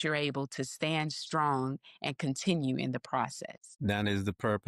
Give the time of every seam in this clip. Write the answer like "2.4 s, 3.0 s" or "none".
none